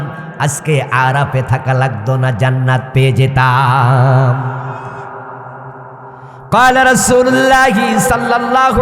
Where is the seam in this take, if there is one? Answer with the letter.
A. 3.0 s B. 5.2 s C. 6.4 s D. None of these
C